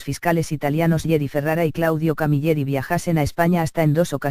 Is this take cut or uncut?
cut